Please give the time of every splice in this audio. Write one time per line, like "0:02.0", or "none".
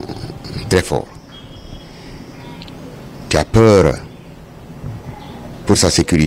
none